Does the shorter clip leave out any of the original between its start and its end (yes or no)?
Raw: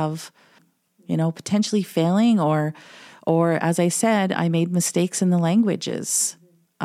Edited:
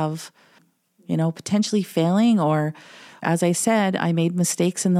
yes